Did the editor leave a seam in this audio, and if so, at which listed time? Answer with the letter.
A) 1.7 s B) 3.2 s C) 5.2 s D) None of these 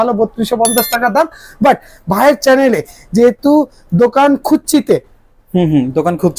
D